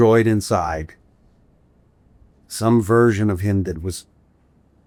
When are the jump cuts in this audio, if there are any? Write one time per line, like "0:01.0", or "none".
none

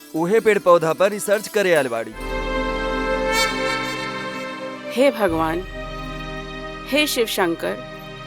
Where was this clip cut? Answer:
0:02.2

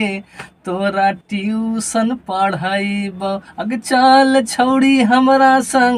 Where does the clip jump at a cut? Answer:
none

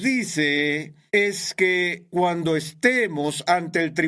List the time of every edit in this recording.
0:00.9
0:02.0

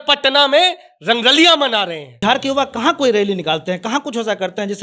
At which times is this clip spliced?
0:02.1

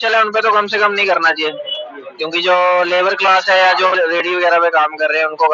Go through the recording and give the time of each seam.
none

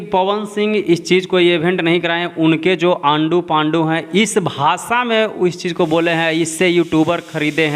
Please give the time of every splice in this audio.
none

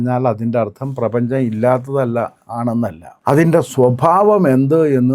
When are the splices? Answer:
0:03.1

